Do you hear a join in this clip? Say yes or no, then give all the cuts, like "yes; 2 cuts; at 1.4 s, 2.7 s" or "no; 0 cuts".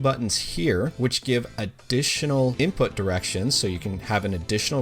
yes; 2 cuts; at 0.9 s, 2.5 s